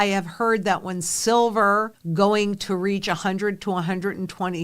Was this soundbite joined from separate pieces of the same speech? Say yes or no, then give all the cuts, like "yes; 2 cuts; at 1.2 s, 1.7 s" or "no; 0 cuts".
yes; 1 cut; at 2.0 s